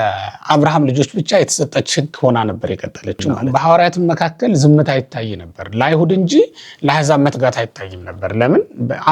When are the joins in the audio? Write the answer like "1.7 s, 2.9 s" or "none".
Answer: 3.4 s